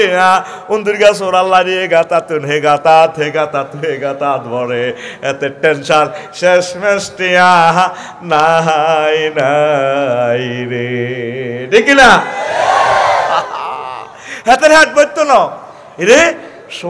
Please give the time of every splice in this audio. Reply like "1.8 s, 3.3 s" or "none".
none